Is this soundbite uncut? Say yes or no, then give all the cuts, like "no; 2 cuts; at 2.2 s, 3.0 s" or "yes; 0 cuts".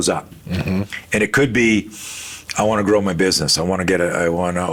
yes; 0 cuts